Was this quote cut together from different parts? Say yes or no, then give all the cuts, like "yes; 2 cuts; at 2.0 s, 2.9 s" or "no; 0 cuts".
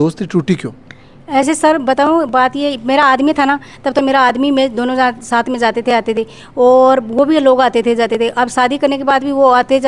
no; 0 cuts